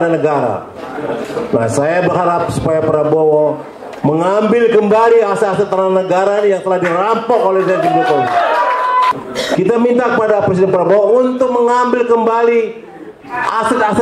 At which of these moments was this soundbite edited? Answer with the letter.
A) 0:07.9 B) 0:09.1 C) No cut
B